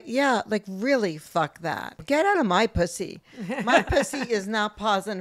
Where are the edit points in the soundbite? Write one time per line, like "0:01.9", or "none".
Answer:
0:01.9